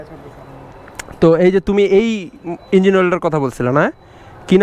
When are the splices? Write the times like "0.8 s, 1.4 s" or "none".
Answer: none